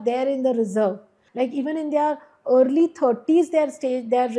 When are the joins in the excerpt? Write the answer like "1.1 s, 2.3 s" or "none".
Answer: 1.1 s